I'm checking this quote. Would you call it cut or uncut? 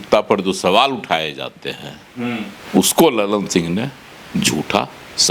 uncut